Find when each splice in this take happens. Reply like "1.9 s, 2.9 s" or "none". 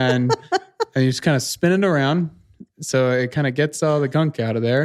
none